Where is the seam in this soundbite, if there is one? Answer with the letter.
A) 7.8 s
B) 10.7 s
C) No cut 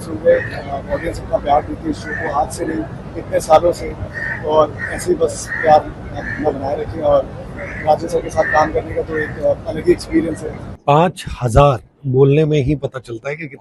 B